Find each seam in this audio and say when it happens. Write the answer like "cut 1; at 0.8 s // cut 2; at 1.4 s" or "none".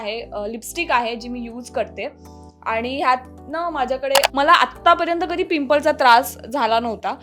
cut 1; at 4.3 s

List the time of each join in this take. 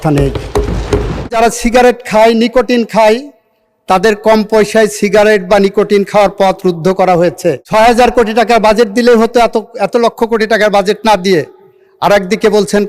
cut 1; at 1.3 s // cut 2; at 7.6 s

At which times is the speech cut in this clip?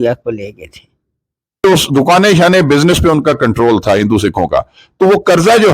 cut 1; at 1.6 s

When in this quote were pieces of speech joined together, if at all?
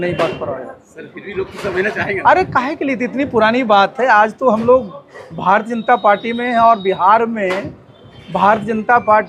none

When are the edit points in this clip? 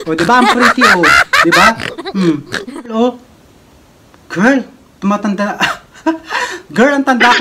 cut 1; at 2.9 s

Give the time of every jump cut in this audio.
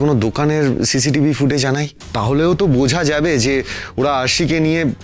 cut 1; at 2.0 s

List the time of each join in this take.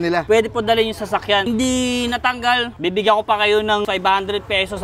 cut 1; at 1.5 s // cut 2; at 3.9 s

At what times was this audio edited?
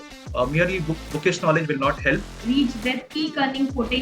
cut 1; at 2.3 s

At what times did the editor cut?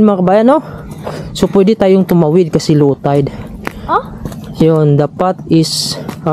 none

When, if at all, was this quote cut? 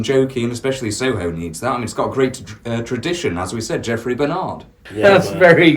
cut 1; at 4.8 s

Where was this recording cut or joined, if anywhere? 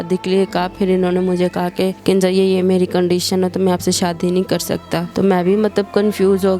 cut 1; at 5.1 s

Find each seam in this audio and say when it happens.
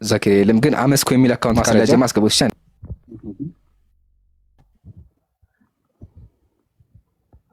cut 1; at 2.5 s

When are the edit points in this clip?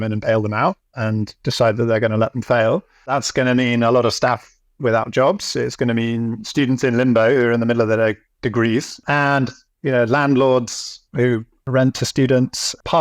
cut 1; at 3.1 s // cut 2; at 9.0 s // cut 3; at 11.7 s

